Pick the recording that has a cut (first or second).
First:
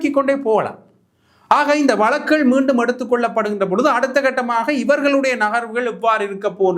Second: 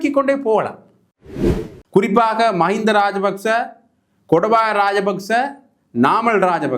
second